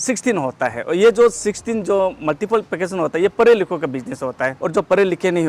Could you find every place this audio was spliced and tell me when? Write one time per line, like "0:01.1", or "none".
0:04.5